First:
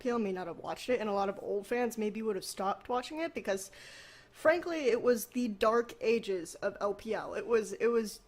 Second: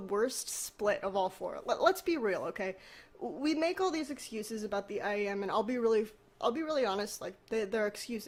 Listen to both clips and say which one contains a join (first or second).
first